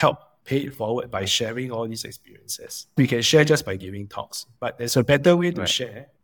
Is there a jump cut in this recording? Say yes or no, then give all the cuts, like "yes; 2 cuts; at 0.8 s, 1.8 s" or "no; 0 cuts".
yes; 1 cut; at 2.9 s